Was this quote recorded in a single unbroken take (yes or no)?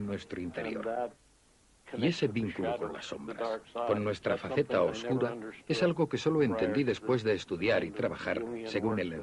no